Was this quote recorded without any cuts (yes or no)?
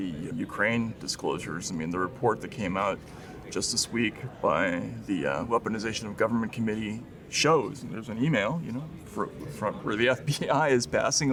yes